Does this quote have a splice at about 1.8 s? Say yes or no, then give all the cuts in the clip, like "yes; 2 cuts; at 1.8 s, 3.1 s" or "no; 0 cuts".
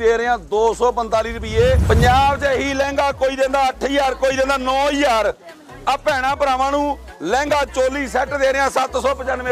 yes; 1 cut; at 1.8 s